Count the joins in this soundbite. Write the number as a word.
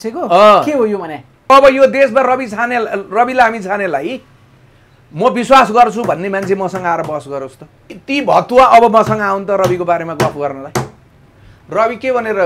two